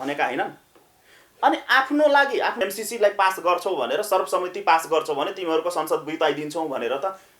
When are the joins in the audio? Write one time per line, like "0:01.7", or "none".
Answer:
0:02.6